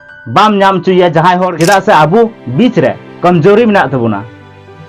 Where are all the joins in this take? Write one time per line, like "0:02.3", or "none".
0:01.5